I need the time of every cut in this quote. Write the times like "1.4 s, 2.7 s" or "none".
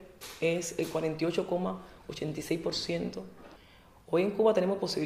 none